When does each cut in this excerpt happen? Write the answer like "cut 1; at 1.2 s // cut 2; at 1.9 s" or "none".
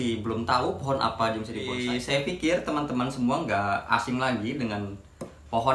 cut 1; at 1.8 s